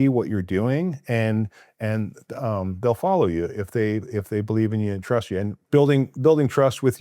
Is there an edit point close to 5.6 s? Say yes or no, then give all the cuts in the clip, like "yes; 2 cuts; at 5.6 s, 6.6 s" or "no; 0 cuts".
yes; 1 cut; at 5.6 s